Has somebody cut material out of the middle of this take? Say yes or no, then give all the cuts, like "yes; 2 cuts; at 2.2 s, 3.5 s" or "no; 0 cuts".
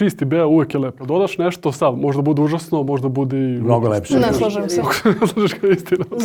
no; 0 cuts